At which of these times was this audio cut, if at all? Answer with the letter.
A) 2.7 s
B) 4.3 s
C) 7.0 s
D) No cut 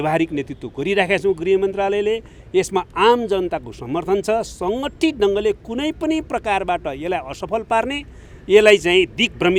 D